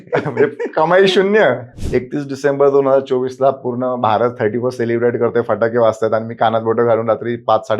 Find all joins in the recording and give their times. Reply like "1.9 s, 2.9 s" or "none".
1.7 s